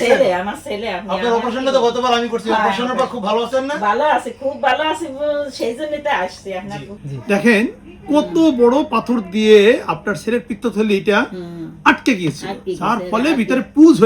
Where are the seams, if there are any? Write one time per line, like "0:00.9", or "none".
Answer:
0:07.0